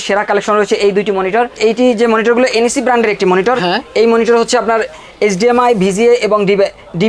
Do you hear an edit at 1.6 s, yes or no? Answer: yes